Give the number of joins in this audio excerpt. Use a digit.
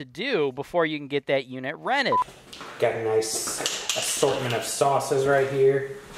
1